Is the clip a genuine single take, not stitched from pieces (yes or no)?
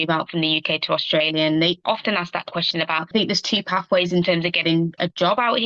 no